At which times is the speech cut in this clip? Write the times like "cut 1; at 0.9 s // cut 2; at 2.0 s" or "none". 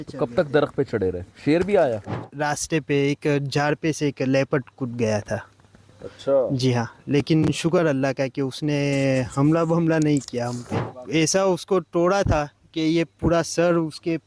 cut 1; at 2.2 s // cut 2; at 10.8 s